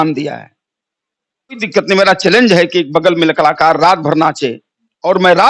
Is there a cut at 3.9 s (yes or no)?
no